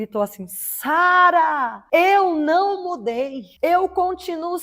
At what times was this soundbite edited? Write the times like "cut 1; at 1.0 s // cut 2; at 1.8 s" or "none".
cut 1; at 1.7 s // cut 2; at 3.4 s